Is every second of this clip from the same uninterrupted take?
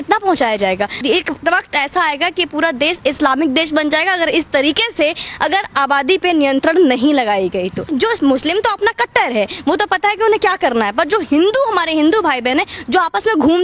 no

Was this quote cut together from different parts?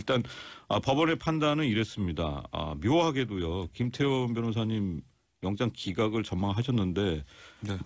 no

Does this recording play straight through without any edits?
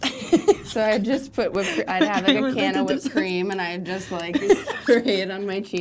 yes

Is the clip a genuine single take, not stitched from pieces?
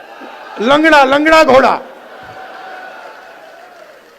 yes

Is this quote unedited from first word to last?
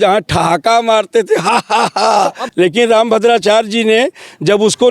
no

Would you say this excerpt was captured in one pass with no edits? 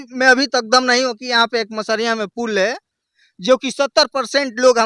yes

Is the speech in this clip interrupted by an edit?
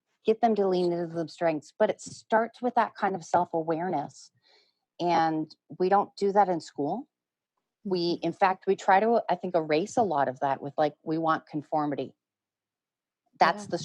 no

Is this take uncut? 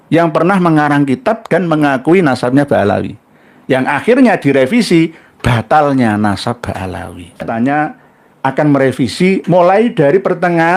no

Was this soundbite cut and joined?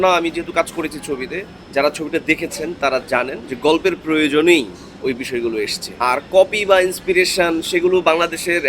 yes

